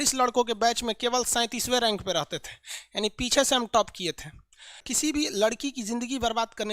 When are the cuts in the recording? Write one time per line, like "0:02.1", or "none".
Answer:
0:04.8

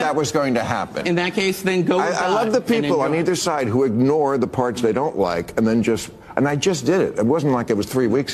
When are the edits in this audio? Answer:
none

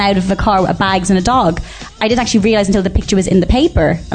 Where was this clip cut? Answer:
0:01.9

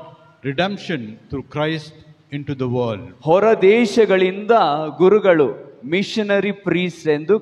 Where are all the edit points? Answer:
0:03.1

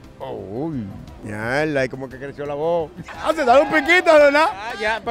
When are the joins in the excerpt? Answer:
0:01.1
0:03.1

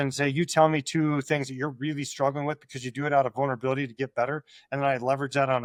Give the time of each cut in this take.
none

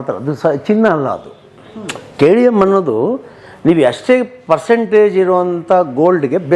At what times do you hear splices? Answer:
none

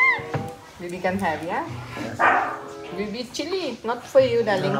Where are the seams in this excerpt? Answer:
0:02.7

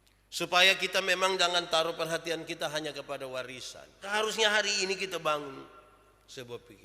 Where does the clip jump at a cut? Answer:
0:04.0

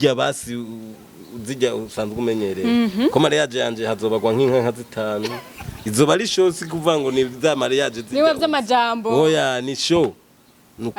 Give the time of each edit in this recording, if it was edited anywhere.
none

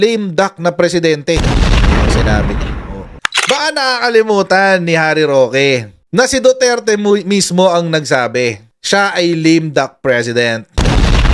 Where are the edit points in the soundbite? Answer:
0:03.5

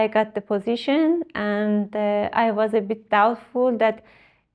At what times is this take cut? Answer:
none

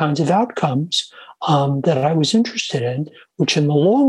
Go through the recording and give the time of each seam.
none

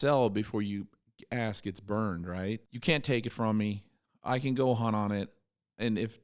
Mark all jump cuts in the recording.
0:02.7

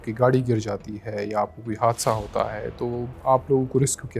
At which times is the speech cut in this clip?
0:03.1

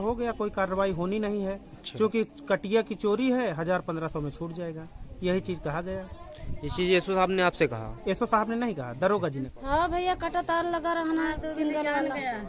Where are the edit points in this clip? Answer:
0:09.5

